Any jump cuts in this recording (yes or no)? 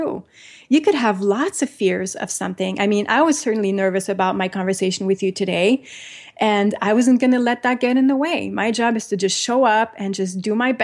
no